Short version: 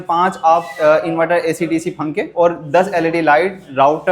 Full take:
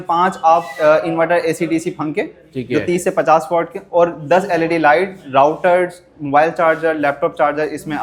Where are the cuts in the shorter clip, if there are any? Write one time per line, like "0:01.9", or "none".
0:02.3